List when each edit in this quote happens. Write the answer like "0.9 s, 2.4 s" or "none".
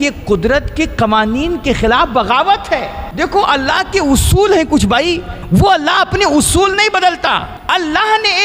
3.0 s, 5.3 s, 7.5 s